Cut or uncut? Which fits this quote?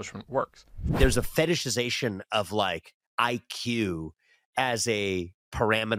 cut